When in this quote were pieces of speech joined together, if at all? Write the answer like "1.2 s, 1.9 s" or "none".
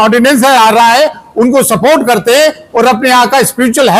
none